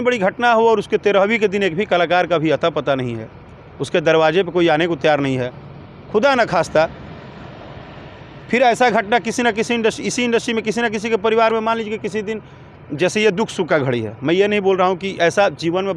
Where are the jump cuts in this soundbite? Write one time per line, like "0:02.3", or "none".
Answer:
none